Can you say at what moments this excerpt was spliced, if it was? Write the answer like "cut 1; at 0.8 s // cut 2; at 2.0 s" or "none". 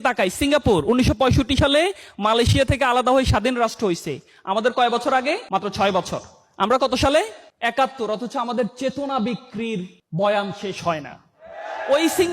cut 1; at 5.4 s // cut 2; at 7.4 s